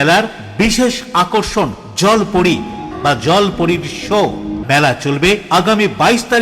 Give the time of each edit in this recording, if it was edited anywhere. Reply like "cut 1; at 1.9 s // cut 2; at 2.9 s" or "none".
cut 1; at 2.9 s // cut 2; at 4.6 s